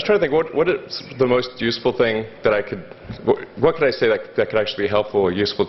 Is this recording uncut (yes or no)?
no